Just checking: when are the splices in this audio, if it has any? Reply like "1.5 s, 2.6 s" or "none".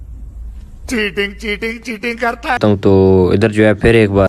2.6 s